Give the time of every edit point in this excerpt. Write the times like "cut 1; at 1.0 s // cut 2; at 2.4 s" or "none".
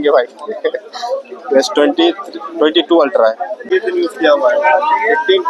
cut 1; at 3.7 s